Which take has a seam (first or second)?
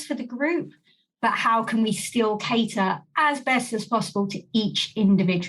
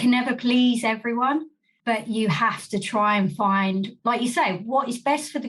second